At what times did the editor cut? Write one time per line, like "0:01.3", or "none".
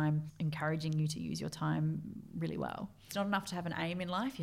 0:03.1